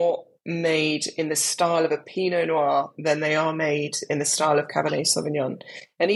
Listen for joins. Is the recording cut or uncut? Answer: uncut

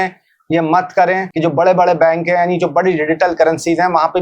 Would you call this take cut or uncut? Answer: cut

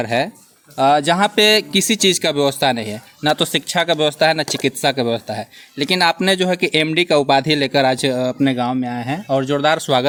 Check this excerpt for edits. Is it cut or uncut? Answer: uncut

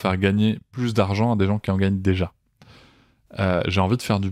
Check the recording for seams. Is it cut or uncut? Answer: uncut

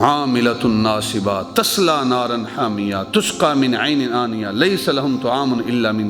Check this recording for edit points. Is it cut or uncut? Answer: uncut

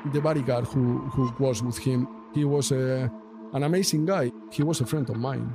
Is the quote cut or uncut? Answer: cut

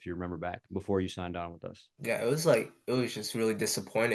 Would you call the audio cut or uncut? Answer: uncut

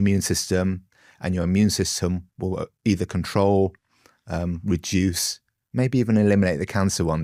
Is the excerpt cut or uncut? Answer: uncut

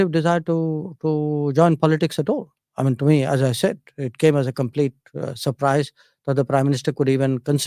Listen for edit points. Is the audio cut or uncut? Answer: uncut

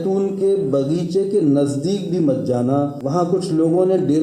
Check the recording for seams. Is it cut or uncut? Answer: cut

